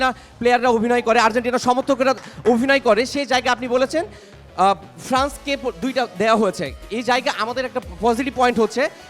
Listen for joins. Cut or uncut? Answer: uncut